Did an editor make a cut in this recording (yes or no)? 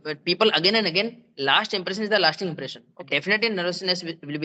yes